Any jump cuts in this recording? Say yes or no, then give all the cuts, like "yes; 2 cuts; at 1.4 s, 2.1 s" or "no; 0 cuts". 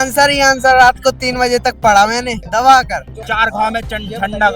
yes; 2 cuts; at 2.4 s, 3.1 s